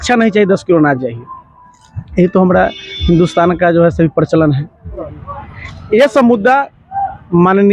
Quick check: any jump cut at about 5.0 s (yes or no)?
yes